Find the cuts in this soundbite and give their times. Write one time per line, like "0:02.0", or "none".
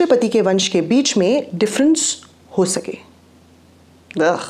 none